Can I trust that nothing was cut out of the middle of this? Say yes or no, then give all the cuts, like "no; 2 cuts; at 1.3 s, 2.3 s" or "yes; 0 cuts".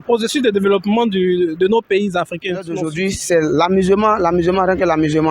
no; 1 cut; at 2.9 s